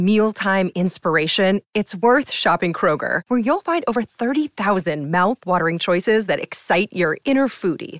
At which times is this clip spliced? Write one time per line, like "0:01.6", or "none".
none